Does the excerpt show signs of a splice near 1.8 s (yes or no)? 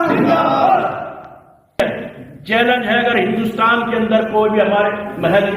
yes